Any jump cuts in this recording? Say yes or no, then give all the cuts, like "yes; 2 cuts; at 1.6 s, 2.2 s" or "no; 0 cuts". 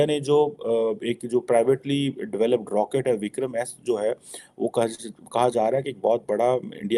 no; 0 cuts